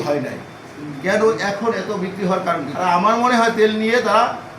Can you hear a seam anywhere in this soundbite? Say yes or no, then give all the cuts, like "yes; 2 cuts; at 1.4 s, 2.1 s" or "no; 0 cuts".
yes; 1 cut; at 2.7 s